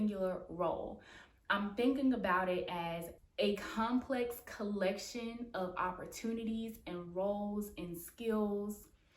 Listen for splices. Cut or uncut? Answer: cut